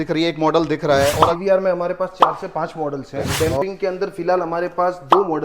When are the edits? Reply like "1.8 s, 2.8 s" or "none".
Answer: 1.3 s, 3.2 s